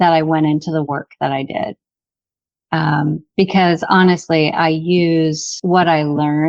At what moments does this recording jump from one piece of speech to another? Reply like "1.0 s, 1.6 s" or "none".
5.5 s